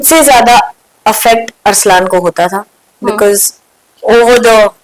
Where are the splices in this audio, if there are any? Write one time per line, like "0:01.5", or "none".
none

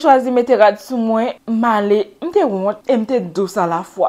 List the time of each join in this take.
0:01.4
0:02.8

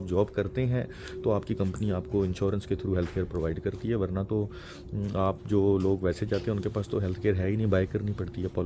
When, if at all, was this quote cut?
none

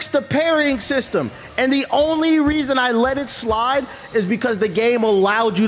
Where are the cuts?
none

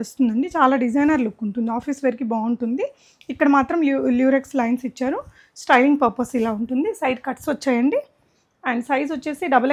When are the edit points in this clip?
none

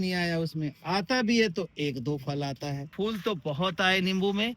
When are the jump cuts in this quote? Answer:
0:02.9

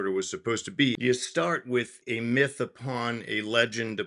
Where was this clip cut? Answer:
0:01.0
0:02.0

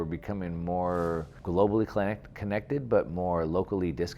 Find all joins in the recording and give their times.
0:01.3

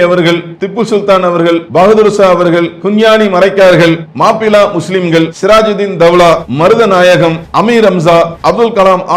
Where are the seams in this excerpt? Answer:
0:01.7
0:02.8
0:04.1
0:05.3
0:06.5
0:07.4
0:08.4

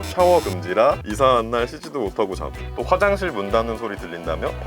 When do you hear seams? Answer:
0:01.1

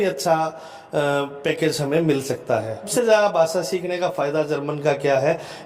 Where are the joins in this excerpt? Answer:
0:02.9

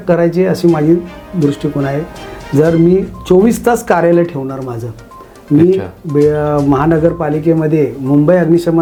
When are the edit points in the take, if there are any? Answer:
none

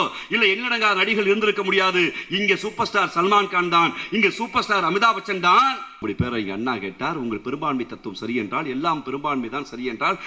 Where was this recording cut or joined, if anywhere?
0:06.0

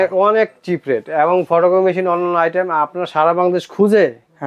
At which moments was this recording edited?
none

